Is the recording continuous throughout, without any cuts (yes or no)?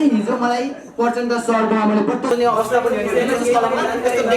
no